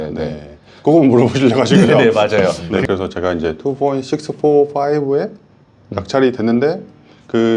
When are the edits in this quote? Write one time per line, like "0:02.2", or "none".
0:02.7